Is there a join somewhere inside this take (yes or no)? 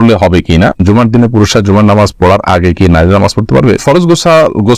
yes